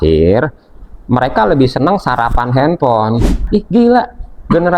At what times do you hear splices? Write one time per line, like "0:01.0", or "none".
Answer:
0:03.4